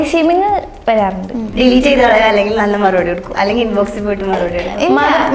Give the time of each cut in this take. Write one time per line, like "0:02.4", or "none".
0:01.4

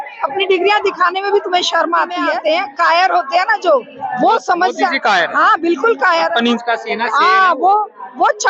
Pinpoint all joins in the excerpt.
0:02.3

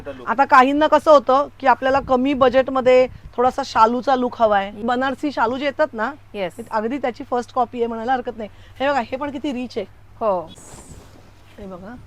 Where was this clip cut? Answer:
0:04.8
0:10.5

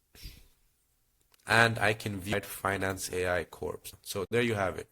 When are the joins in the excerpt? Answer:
0:02.3
0:03.9

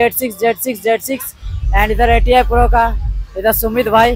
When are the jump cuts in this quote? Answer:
none

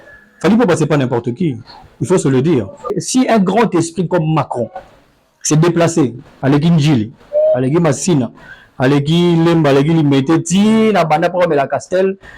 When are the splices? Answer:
0:03.0

